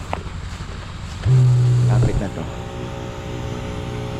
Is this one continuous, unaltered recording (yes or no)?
yes